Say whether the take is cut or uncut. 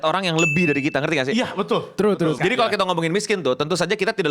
cut